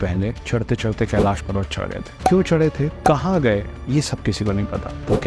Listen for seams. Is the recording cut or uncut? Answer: uncut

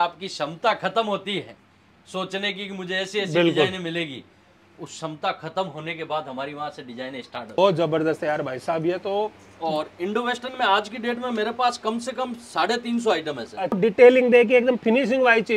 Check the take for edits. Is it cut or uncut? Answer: cut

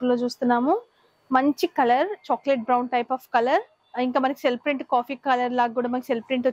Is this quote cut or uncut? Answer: uncut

